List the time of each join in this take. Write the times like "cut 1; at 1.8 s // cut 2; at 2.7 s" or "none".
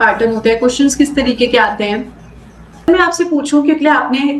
cut 1; at 2.9 s